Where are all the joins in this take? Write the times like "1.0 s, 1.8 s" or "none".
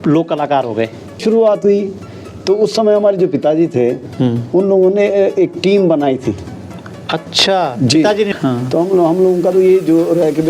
1.2 s, 8.3 s